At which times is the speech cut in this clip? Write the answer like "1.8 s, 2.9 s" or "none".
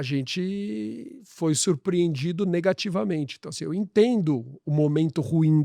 none